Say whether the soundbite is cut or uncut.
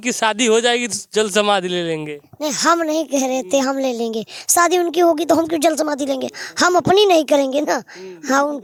uncut